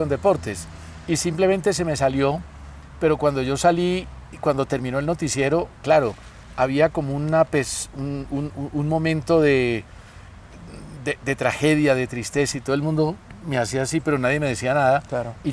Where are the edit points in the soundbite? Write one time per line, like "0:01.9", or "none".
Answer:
none